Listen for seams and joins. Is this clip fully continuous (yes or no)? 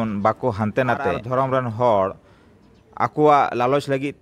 no